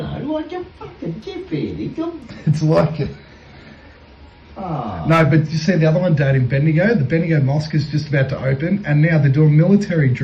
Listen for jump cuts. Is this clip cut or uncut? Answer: uncut